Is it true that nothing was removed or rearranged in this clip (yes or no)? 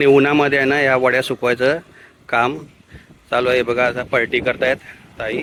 yes